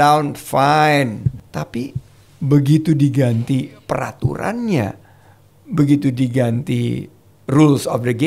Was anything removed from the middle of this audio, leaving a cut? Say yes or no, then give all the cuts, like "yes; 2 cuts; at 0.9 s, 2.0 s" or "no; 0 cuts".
yes; 1 cut; at 1.4 s